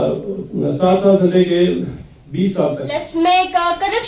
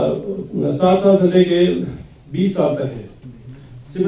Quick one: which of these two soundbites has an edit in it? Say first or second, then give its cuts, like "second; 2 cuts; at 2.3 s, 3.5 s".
first; 1 cut; at 2.9 s